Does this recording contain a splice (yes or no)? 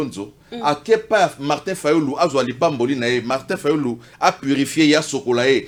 no